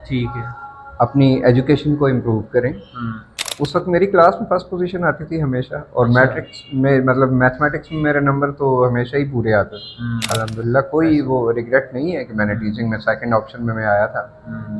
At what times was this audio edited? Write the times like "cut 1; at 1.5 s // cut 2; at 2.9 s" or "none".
cut 1; at 3.4 s // cut 2; at 10.3 s